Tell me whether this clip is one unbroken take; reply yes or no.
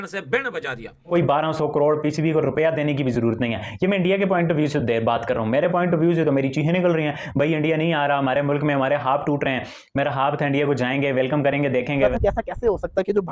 no